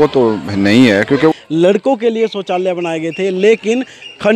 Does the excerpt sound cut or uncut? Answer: cut